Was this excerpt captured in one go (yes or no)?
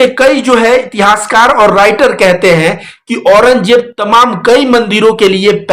yes